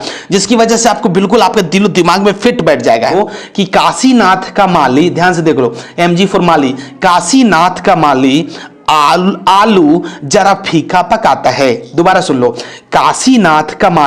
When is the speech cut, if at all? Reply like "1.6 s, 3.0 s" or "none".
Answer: 3.1 s